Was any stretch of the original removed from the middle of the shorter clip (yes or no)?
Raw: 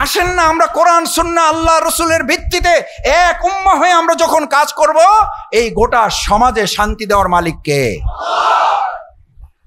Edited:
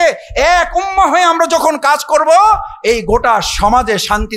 no